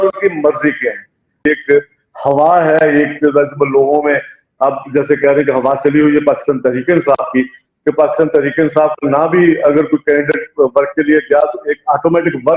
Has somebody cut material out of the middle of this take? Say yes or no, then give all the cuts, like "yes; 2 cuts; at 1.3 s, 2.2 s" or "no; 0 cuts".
yes; 1 cut; at 1.3 s